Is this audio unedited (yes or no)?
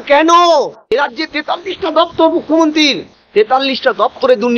no